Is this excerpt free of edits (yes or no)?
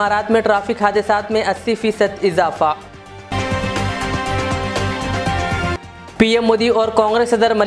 yes